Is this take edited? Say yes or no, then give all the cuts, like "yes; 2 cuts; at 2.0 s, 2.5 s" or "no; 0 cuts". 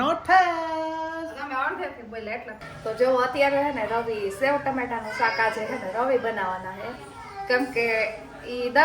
yes; 1 cut; at 2.7 s